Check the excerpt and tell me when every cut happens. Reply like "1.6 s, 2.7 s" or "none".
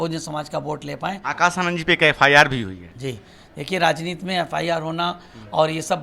1.2 s